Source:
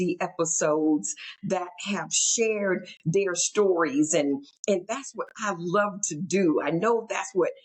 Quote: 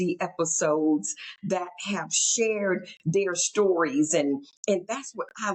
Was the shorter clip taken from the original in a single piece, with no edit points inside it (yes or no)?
yes